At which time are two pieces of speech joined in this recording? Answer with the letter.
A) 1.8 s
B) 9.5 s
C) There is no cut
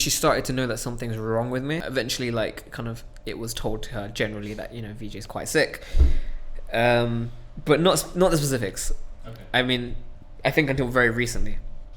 A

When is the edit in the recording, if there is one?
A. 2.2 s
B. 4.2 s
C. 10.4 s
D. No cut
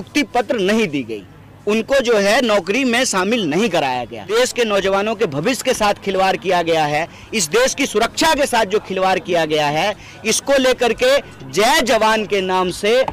B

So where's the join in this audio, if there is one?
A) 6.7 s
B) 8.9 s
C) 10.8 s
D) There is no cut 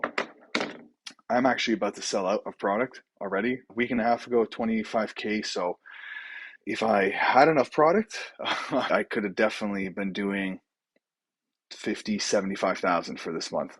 B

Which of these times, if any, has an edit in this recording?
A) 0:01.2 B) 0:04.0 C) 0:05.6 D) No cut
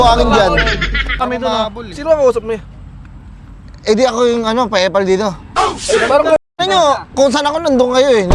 A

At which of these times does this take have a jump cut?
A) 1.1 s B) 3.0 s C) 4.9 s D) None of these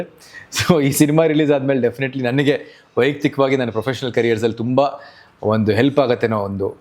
D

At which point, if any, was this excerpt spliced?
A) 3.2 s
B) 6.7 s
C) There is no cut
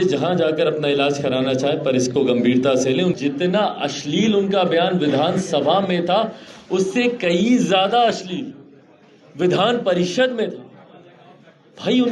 A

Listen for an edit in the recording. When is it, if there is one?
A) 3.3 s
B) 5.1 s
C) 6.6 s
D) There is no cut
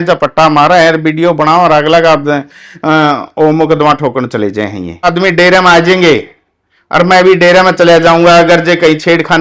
B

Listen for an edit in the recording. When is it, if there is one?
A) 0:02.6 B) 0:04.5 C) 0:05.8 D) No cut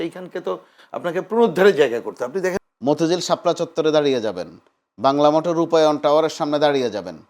A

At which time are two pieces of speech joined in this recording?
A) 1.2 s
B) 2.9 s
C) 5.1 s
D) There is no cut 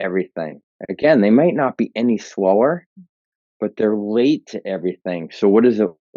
D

